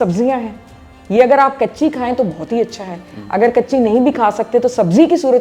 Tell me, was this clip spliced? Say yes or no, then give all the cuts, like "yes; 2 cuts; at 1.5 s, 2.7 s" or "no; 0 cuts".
no; 0 cuts